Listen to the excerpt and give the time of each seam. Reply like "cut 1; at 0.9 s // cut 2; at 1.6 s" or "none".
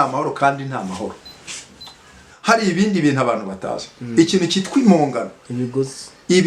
cut 1; at 2.3 s